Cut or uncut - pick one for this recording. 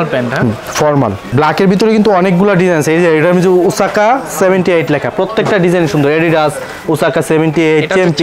cut